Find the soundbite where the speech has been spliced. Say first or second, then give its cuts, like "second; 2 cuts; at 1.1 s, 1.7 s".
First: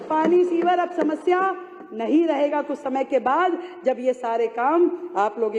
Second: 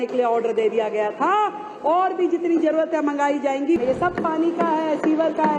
second; 1 cut; at 3.8 s